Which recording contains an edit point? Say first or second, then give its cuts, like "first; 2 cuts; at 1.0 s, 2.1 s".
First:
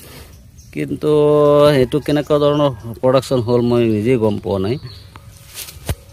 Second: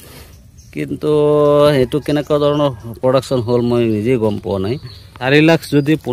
second; 1 cut; at 5.1 s